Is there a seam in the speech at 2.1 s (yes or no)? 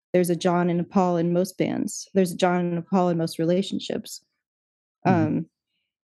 no